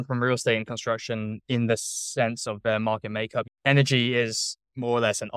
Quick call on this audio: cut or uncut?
uncut